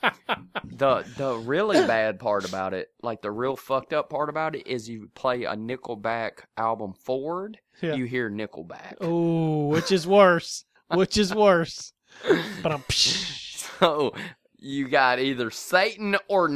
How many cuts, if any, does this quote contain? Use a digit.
0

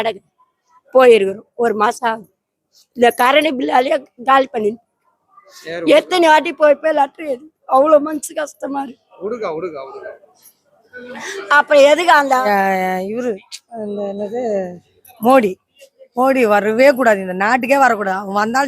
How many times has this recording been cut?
1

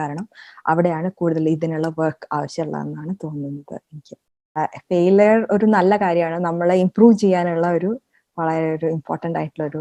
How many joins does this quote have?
1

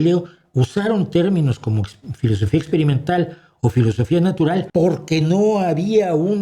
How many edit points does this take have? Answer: 1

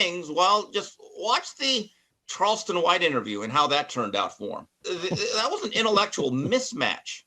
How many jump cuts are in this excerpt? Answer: 1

